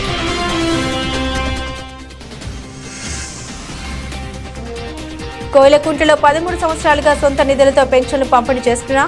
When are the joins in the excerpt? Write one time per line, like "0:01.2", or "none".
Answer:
0:02.9
0:04.9